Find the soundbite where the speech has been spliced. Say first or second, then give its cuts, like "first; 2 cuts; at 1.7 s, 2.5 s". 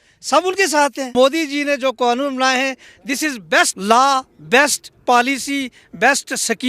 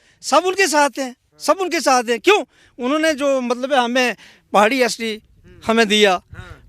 first; 2 cuts; at 1.1 s, 3.8 s